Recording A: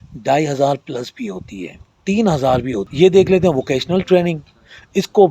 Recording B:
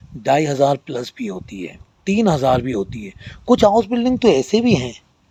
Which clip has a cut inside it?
A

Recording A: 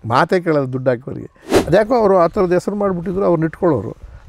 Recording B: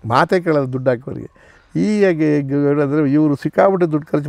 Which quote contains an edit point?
A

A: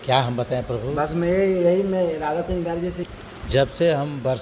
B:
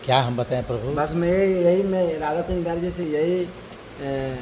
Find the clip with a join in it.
A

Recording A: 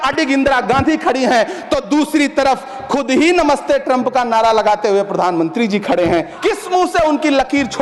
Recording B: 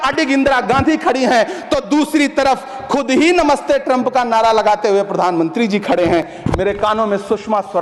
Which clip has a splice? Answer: A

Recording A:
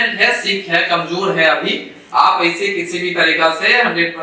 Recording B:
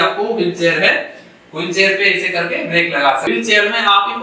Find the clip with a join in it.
B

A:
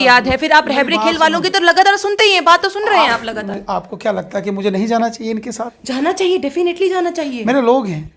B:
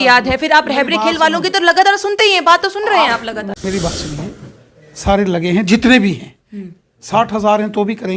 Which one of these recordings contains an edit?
B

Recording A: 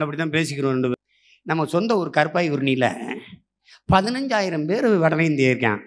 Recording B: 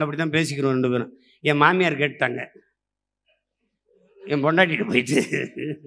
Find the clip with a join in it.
A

